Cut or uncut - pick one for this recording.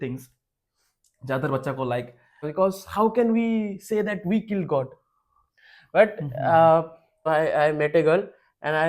cut